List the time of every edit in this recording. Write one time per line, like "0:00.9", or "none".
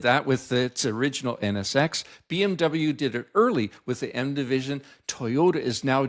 none